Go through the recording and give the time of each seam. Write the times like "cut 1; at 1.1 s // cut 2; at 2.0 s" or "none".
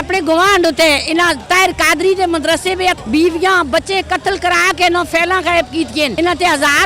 cut 1; at 3.0 s // cut 2; at 6.1 s

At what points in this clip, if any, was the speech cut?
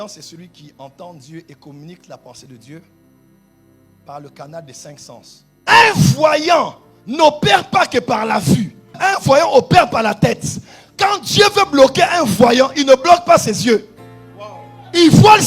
cut 1; at 5.5 s

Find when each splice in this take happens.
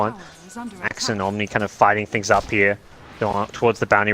cut 1; at 2.9 s

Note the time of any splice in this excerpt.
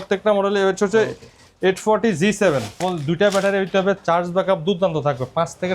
cut 1; at 2.8 s

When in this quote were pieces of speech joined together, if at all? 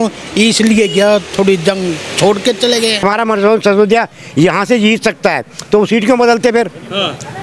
cut 1; at 3.0 s

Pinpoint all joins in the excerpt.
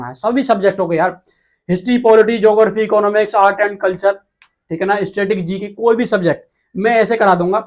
none

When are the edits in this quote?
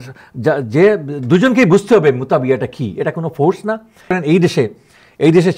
cut 1; at 4.1 s

